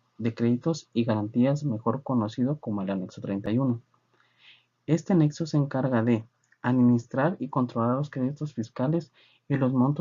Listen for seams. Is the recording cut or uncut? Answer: cut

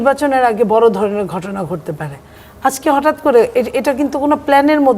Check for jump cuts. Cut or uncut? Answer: uncut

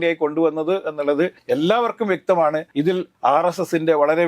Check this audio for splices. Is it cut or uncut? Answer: cut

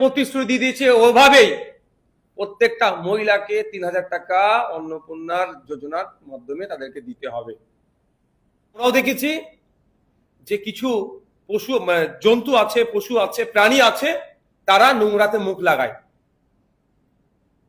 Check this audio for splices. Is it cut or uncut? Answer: cut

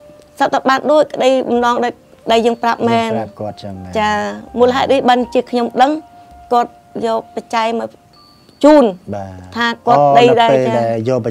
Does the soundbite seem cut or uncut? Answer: uncut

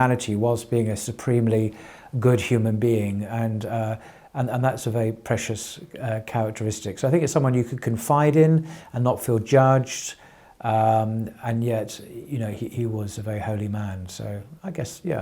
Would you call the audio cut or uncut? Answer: uncut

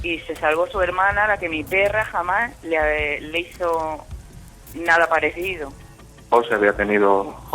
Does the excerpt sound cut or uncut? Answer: cut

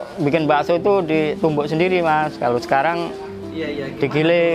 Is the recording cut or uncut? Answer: uncut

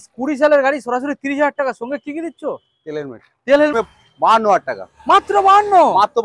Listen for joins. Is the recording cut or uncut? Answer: cut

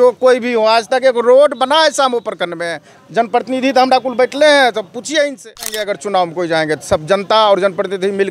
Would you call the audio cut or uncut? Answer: cut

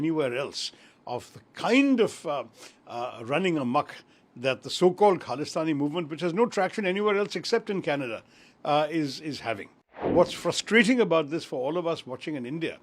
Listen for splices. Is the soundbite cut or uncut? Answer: cut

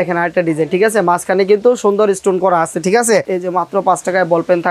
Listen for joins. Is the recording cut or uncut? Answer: cut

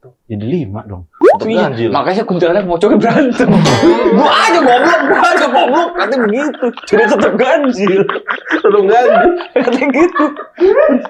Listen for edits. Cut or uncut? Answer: uncut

